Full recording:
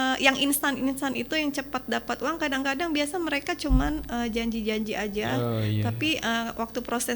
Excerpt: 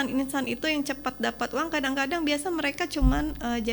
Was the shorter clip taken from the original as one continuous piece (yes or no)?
yes